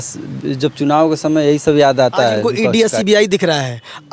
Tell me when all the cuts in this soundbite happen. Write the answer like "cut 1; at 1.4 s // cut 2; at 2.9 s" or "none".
cut 1; at 2.4 s